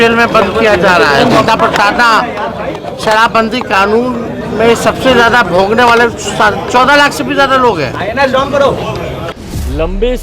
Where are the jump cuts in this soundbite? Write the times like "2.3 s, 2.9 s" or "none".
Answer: 9.2 s